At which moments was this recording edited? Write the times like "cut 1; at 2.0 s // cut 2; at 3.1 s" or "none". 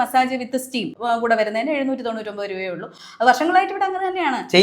cut 1; at 0.9 s

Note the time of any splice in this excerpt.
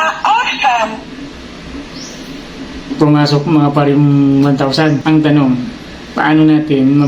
cut 1; at 5.0 s

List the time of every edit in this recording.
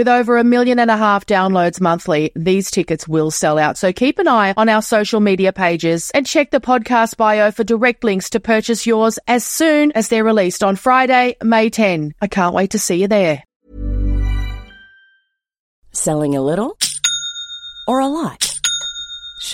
cut 1; at 13.6 s

